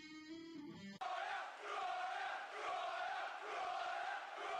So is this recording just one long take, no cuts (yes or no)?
yes